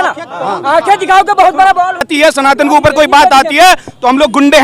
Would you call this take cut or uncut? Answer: cut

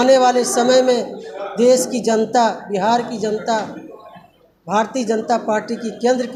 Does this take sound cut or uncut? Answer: uncut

